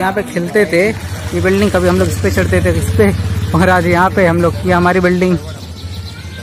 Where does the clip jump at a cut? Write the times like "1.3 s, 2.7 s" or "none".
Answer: 1.5 s